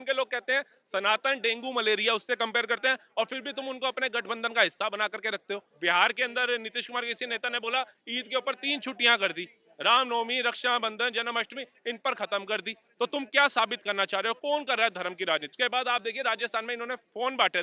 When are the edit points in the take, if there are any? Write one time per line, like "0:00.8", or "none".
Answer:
0:05.7
0:15.5